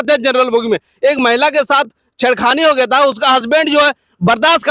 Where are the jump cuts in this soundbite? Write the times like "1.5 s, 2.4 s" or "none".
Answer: none